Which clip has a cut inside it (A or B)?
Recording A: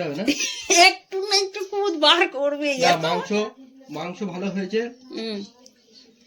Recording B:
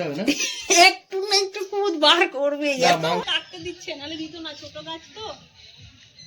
B